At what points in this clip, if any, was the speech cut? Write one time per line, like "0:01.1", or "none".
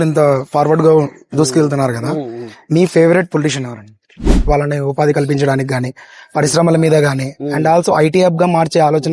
0:04.4

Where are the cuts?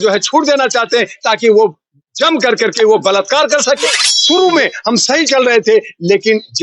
0:04.1

